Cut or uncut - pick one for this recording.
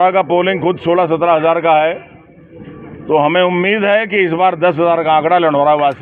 uncut